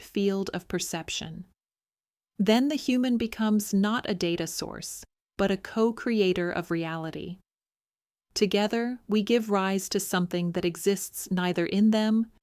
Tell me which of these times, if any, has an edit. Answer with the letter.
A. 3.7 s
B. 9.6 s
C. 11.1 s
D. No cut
D